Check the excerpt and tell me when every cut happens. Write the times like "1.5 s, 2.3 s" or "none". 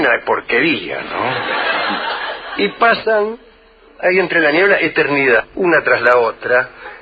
none